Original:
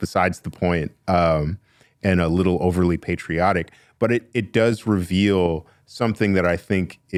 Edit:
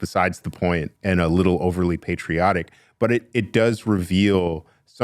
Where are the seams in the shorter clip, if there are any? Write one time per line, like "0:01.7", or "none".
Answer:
0:00.9